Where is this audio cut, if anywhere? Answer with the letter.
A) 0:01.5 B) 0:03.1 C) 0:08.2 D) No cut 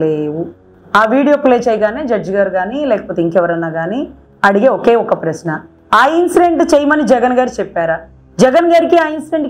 C